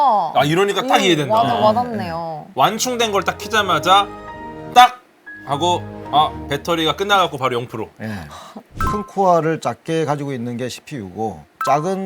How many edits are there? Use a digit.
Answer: 1